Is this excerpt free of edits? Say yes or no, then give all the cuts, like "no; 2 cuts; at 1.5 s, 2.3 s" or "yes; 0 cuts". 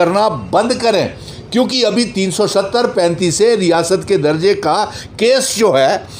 yes; 0 cuts